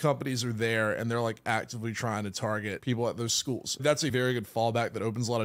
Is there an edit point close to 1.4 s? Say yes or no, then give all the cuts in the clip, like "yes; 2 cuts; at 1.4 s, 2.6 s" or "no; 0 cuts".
no; 2 cuts; at 2.8 s, 3.9 s